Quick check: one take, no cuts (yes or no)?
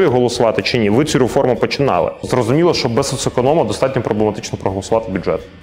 no